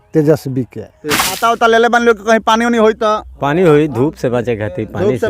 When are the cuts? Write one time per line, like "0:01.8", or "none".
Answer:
0:01.3